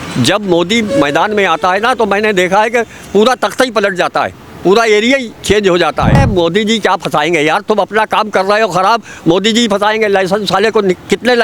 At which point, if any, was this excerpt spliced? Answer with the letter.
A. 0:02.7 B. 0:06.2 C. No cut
B